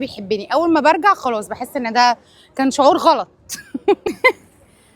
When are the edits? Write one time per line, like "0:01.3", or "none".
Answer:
0:04.0

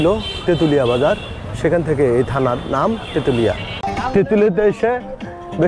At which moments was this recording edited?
0:03.9

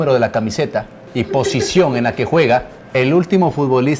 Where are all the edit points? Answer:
0:01.0
0:02.8

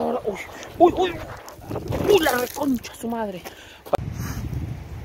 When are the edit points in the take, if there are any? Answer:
0:03.9

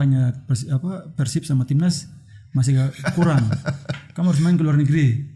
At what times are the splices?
none

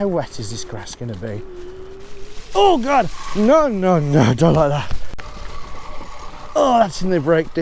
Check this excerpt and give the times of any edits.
0:05.2

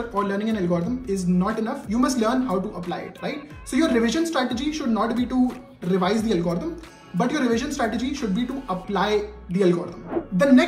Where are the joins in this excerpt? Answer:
none

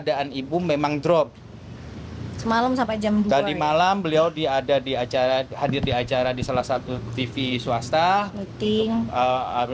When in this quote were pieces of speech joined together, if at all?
none

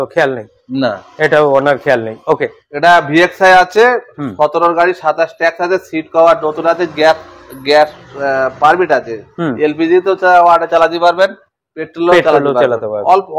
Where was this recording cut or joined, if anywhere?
none

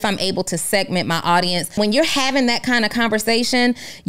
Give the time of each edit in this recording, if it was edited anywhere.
0:01.7

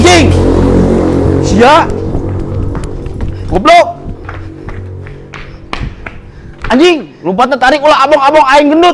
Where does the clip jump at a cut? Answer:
none

